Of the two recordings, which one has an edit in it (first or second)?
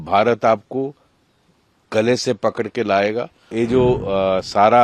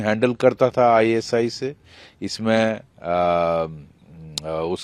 first